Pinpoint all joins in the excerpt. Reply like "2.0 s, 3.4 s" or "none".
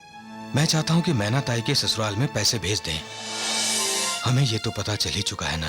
4.2 s